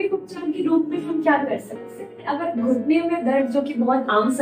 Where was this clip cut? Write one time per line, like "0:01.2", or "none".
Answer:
0:02.3